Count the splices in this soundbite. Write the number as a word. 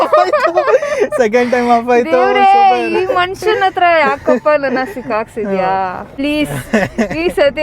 one